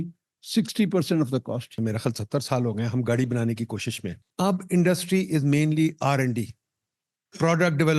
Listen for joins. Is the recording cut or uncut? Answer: cut